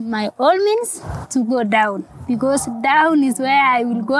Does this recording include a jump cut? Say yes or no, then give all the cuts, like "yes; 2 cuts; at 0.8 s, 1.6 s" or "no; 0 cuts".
no; 0 cuts